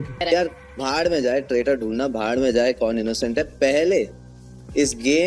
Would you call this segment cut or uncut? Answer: uncut